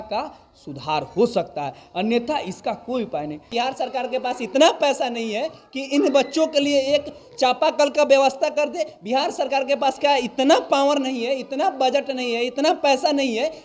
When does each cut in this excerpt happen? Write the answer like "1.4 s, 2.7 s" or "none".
3.5 s